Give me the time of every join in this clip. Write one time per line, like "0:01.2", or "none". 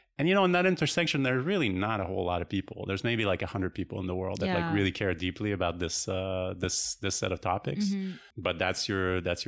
0:08.3